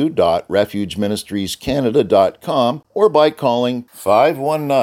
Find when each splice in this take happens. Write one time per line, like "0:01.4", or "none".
0:02.8